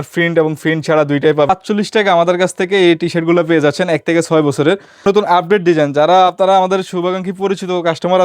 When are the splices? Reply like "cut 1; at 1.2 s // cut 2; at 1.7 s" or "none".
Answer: cut 1; at 1.5 s // cut 2; at 5.0 s

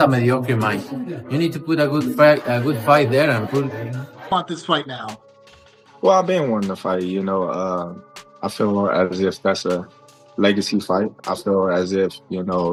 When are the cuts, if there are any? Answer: none

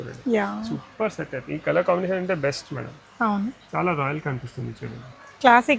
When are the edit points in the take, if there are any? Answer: none

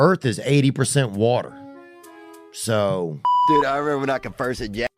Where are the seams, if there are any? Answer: cut 1; at 3.3 s

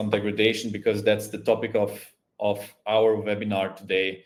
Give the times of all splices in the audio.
none

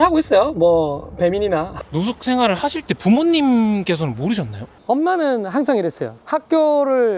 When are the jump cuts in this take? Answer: cut 1; at 1.7 s // cut 2; at 4.7 s // cut 3; at 6.2 s

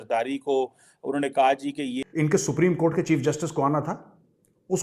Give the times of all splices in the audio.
cut 1; at 2.0 s

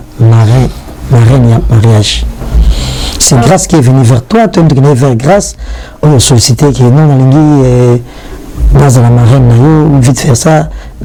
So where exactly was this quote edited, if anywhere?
none

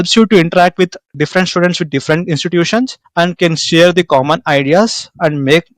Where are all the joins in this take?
cut 1; at 1.1 s

